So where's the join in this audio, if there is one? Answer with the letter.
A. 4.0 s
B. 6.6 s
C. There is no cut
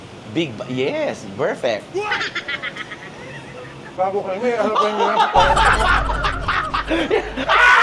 A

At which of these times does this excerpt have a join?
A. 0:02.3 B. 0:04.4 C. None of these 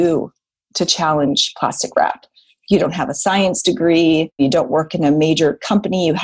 B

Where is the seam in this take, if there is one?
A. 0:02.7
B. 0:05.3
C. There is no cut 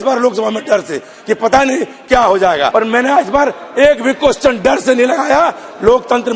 A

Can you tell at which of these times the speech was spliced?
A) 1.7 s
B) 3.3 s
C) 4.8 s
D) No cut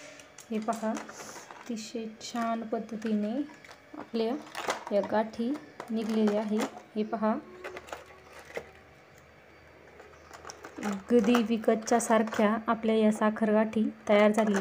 D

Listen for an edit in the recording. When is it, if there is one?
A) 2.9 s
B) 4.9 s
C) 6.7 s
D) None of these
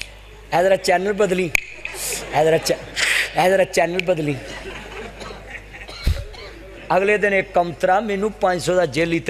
C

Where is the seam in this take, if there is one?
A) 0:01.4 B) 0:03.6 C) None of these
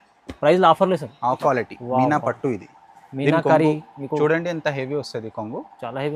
A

